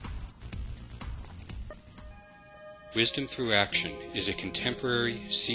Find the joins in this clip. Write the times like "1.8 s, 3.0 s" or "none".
2.1 s